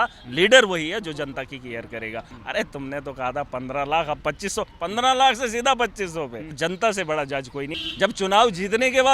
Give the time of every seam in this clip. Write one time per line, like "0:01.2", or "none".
0:02.3
0:06.6
0:07.8